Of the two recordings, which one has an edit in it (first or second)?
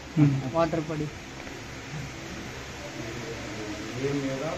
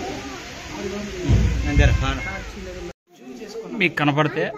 second